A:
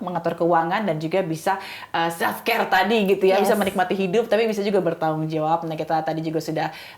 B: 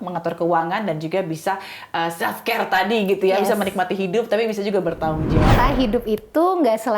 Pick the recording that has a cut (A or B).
B